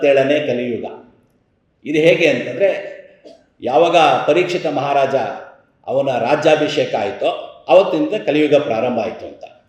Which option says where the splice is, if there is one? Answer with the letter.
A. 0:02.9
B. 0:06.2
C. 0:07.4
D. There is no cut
D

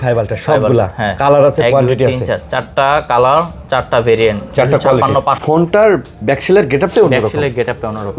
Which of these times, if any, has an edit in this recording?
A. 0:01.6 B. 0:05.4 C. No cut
B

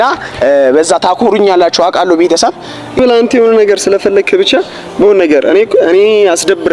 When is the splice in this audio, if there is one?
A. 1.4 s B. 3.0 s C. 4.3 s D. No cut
B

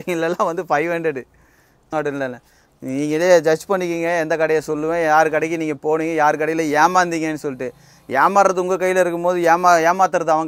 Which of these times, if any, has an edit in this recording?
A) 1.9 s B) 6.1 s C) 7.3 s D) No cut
A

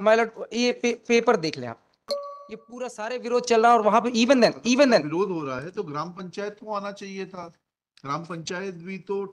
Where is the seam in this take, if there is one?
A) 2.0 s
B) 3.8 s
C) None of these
A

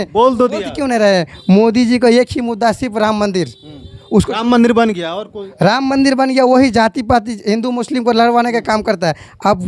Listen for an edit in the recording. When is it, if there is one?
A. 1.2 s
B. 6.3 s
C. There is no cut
C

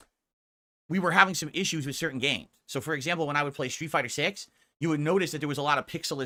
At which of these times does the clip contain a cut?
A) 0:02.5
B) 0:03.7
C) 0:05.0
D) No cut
D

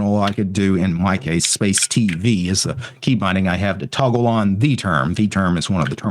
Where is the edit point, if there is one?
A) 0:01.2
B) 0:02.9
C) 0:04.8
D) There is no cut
D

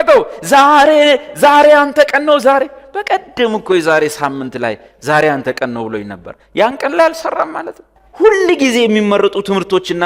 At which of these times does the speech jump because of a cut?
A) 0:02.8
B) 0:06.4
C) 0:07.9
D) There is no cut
C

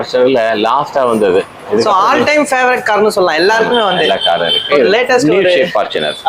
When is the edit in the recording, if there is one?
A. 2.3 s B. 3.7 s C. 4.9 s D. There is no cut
C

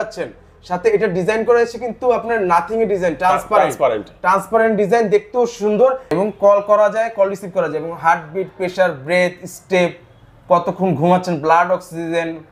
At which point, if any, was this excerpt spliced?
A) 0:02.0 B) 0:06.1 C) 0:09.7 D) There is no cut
B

